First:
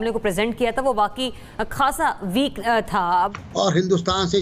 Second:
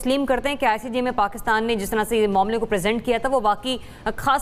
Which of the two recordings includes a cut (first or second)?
first